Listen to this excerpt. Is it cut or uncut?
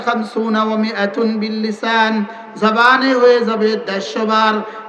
uncut